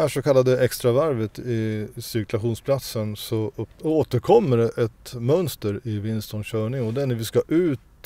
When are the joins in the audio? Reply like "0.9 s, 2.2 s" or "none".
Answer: 3.7 s